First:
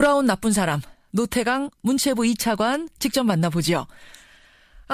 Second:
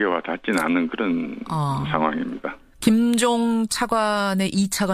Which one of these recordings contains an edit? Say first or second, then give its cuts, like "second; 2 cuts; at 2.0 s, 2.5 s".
first; 1 cut; at 2.3 s